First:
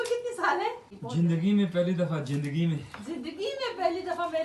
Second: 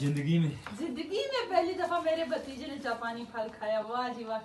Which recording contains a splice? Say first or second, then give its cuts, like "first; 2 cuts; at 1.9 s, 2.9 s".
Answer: first; 1 cut; at 0.9 s